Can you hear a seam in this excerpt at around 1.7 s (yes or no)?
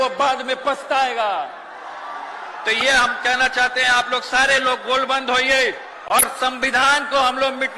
no